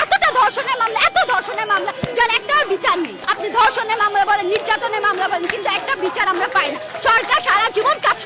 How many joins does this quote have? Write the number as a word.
one